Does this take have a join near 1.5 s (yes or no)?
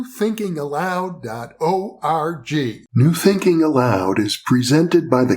no